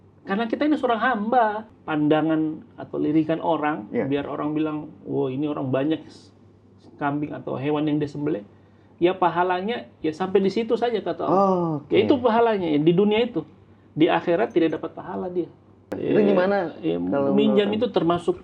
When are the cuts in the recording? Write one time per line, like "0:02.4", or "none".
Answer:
0:01.7
0:15.9